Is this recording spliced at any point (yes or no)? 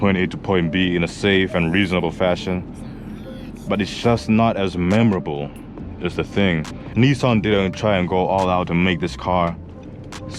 yes